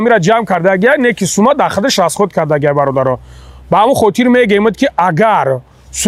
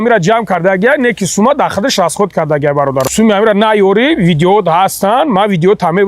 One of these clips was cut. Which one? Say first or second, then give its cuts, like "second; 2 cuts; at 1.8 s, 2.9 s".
second; 1 cut; at 3.1 s